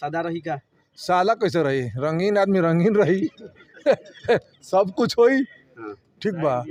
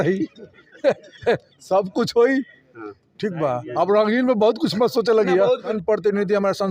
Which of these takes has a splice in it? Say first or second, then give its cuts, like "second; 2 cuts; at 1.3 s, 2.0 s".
second; 1 cut; at 5.7 s